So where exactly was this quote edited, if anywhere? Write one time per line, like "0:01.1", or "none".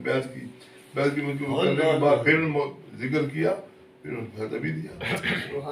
none